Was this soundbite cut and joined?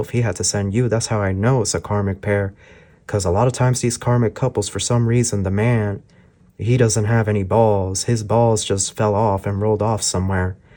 no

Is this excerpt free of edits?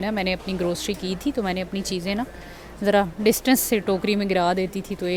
yes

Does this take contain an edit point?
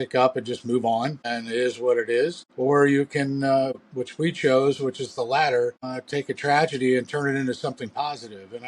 yes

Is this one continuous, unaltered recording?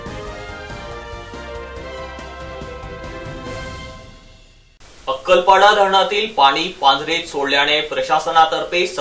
no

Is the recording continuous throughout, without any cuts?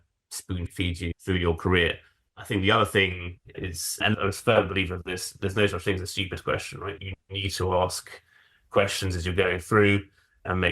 no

